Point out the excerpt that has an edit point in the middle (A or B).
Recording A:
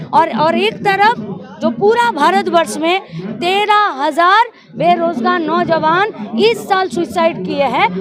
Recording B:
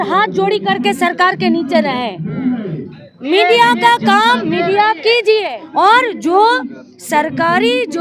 B